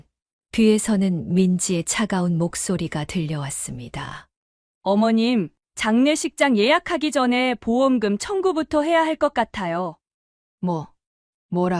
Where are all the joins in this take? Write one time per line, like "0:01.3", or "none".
none